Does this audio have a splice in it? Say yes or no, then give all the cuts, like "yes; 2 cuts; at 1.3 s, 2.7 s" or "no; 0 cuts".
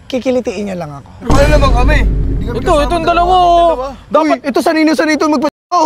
no; 0 cuts